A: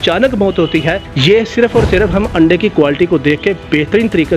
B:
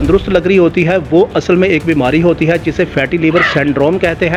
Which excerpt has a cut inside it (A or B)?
A